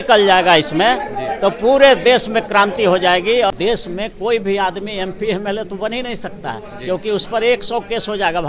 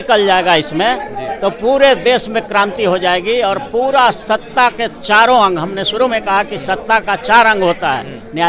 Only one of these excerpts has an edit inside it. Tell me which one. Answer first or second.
first